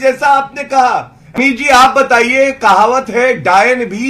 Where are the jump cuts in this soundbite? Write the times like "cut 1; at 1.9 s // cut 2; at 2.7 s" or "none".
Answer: cut 1; at 1.4 s